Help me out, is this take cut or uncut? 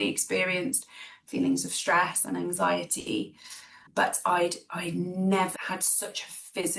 cut